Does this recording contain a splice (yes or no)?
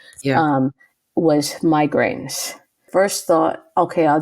yes